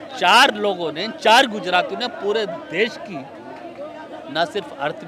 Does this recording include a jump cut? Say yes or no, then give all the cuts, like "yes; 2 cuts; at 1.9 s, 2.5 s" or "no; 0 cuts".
no; 0 cuts